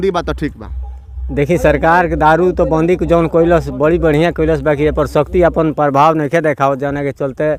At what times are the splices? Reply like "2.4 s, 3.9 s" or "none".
none